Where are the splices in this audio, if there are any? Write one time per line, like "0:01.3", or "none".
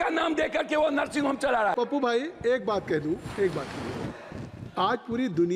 0:01.7